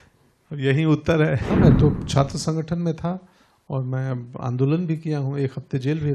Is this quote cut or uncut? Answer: cut